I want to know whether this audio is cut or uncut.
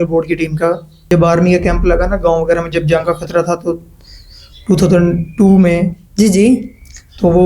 cut